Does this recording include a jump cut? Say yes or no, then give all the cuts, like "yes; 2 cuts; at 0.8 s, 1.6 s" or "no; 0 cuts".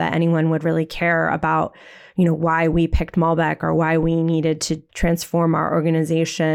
no; 0 cuts